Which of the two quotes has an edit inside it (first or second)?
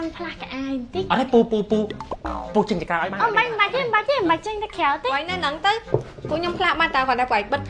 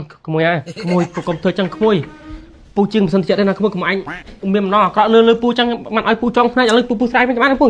first